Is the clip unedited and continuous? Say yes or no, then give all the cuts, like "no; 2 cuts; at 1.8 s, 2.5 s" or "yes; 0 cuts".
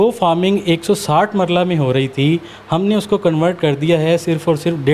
yes; 0 cuts